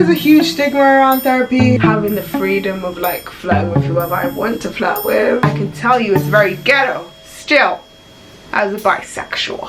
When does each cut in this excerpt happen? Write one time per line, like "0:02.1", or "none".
0:01.8
0:05.5